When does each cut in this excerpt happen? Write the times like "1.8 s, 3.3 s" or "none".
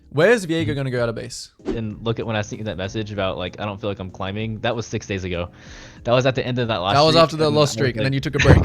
1.7 s